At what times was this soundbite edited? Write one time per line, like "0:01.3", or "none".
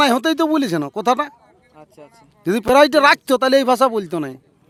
none